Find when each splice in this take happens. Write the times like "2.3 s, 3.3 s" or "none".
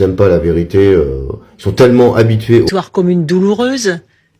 2.7 s